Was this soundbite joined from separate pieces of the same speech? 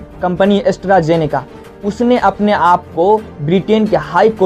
no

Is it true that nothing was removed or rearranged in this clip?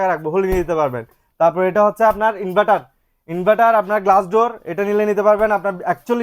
yes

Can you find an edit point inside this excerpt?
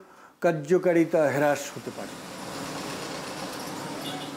no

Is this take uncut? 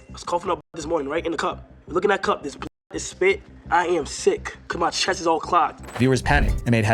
yes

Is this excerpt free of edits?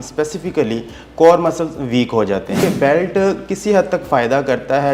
no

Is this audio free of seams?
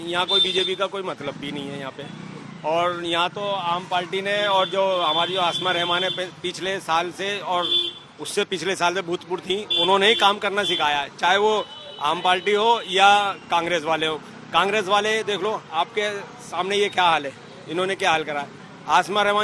yes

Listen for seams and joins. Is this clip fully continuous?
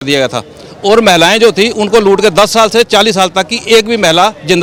yes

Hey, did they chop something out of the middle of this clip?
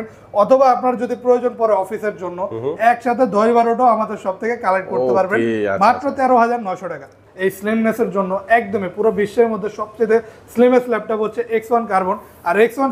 yes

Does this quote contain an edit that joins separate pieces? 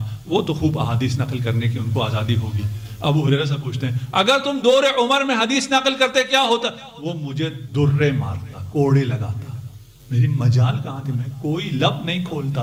no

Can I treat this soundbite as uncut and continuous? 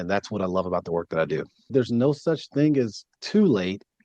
no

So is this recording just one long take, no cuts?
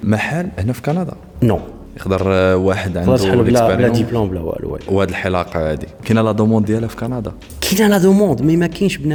yes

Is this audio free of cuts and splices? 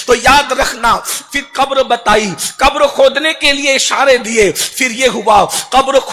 no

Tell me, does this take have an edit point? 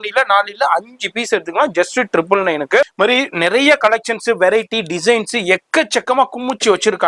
yes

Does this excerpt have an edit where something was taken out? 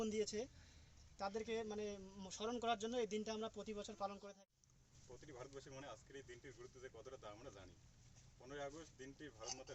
yes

